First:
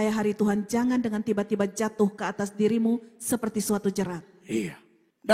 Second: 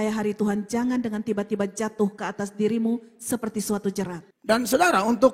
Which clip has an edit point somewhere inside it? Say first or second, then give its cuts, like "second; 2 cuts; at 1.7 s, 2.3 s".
second; 1 cut; at 4.3 s